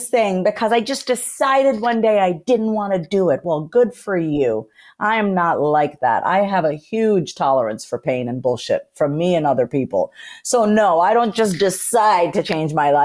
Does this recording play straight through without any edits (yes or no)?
yes